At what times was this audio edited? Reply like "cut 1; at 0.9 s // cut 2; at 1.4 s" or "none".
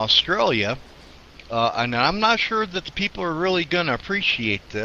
cut 1; at 2.9 s